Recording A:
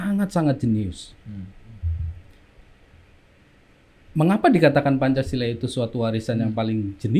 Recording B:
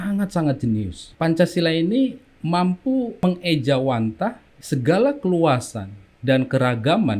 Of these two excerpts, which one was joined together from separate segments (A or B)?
B